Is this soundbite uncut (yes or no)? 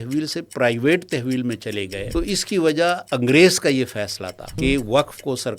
no